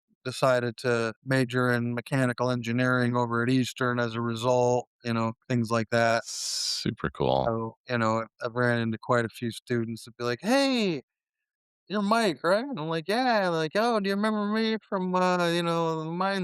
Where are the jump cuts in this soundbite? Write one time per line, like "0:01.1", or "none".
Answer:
0:01.2